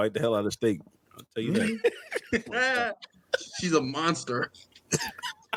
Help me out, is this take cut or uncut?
uncut